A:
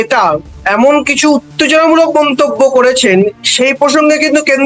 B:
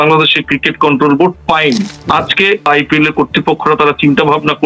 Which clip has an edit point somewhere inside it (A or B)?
B